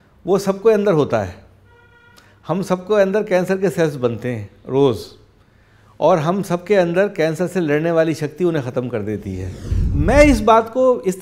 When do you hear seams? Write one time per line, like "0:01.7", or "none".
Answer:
0:09.9